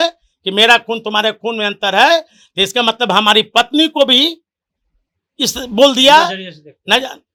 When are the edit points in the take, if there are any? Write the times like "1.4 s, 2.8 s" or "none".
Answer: none